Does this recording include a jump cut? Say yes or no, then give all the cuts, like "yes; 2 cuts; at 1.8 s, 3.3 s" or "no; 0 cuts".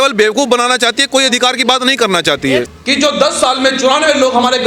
yes; 1 cut; at 2.7 s